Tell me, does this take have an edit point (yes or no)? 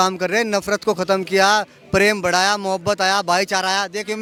no